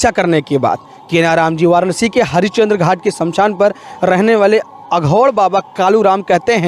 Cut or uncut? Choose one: uncut